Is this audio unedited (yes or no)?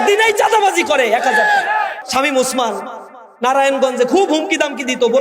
no